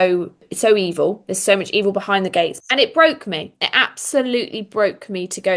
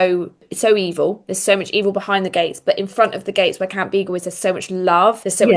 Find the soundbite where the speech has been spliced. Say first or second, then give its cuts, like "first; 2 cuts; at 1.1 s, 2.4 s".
first; 1 cut; at 2.6 s